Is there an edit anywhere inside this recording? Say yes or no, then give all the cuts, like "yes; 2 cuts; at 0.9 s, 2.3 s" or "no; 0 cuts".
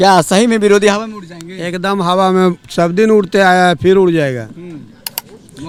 no; 0 cuts